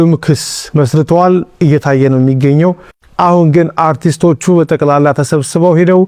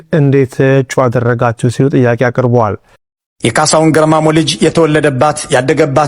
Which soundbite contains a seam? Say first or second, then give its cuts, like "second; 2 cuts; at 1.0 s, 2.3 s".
second; 1 cut; at 2.9 s